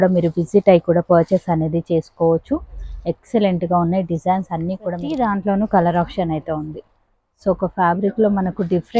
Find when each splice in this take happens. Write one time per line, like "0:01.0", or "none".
0:05.0